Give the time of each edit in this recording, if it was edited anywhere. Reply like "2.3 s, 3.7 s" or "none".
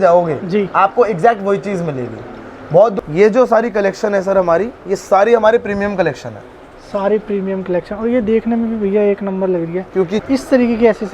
2.9 s, 10.2 s